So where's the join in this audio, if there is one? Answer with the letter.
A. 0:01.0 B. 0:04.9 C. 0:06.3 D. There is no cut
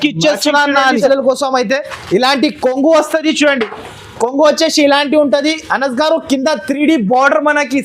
A